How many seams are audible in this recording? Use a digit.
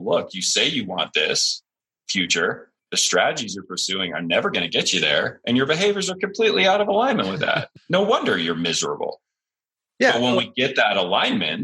2